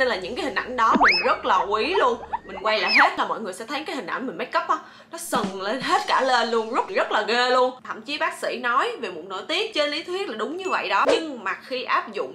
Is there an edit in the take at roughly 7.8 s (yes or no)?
yes